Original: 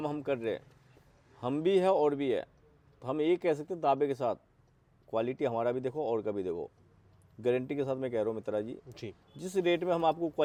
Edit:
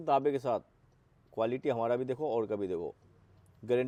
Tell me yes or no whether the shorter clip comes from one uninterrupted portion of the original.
yes